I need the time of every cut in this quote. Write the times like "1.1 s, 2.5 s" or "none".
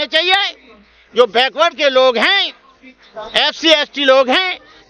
none

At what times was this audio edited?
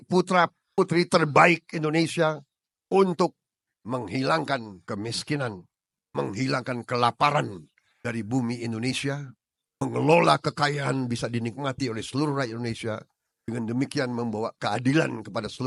none

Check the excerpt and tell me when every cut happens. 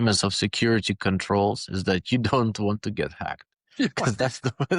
none

